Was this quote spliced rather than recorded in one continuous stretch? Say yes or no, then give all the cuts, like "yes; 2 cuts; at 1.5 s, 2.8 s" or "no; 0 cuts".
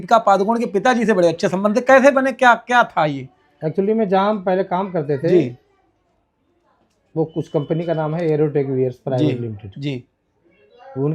no; 0 cuts